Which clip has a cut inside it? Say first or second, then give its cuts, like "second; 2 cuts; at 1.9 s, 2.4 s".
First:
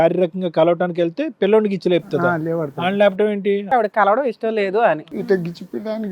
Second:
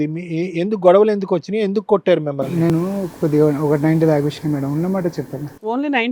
first; 2 cuts; at 3.7 s, 5.0 s